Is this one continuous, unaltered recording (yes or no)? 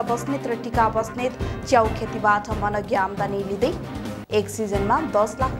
yes